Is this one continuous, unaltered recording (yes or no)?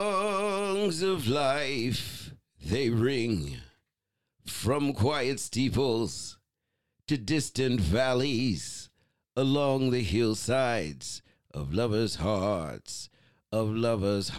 yes